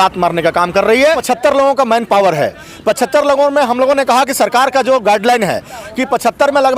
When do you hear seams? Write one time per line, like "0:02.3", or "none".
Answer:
0:01.2